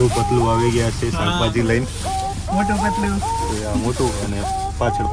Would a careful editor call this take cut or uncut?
uncut